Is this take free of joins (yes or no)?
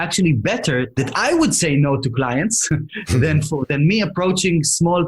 no